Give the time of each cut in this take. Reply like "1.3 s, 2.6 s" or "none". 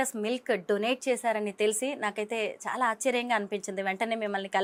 none